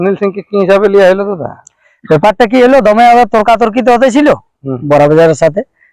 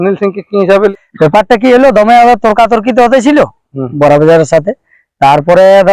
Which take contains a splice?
second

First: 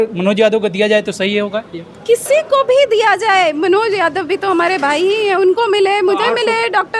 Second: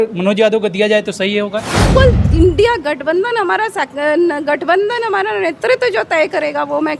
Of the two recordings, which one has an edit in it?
second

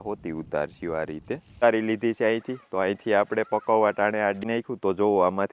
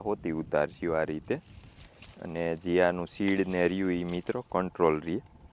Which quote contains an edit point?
first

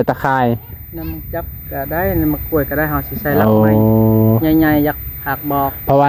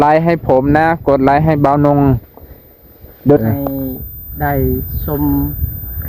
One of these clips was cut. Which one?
second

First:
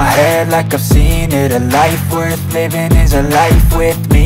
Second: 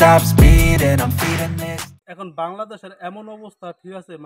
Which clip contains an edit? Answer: second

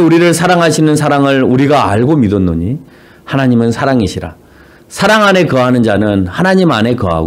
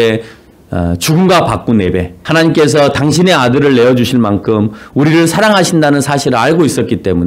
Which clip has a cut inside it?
second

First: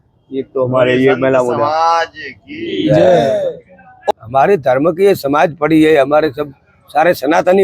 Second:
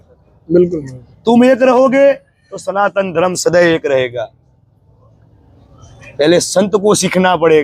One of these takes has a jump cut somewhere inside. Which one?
first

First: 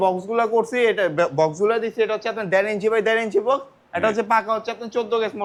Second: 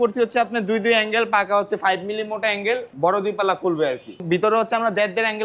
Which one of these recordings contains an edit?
second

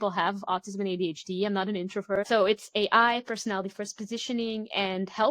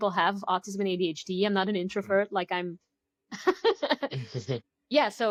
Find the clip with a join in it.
first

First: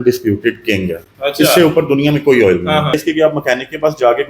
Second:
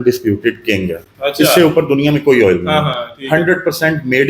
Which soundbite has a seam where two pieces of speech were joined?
first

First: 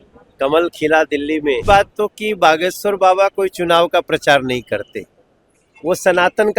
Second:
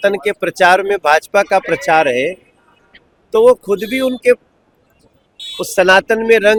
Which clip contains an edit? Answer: first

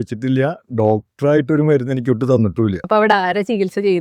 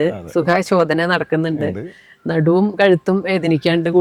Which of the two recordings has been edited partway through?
first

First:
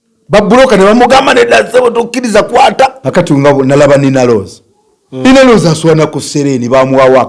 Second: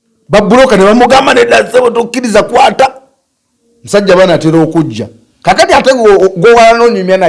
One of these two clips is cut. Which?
first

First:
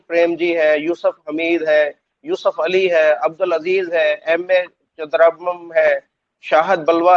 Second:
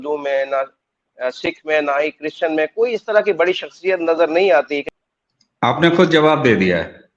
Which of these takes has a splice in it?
second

